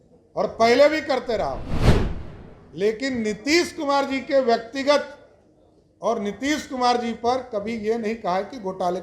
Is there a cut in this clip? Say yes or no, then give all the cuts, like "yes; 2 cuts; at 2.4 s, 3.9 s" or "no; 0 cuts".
no; 0 cuts